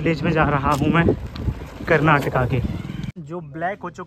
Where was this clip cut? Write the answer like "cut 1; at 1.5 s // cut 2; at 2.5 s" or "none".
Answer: cut 1; at 3.1 s